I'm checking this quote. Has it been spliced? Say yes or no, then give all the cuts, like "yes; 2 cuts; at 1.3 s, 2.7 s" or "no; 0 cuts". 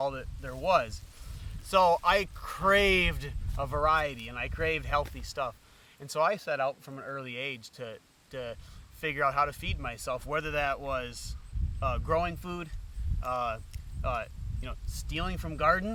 no; 0 cuts